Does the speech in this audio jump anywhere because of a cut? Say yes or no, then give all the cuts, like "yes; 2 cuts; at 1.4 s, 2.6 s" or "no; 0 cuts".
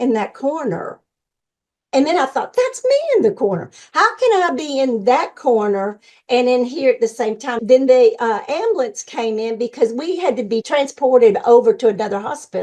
yes; 2 cuts; at 7.6 s, 10.6 s